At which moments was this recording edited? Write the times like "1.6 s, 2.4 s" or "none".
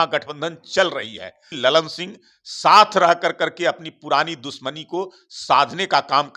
1.4 s